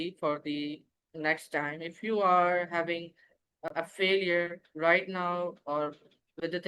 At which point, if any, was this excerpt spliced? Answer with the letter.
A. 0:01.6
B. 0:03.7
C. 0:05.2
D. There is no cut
B